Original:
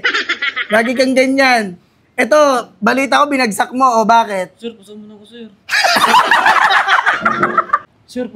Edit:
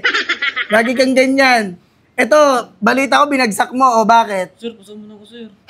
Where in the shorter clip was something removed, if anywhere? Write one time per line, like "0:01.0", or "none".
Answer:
none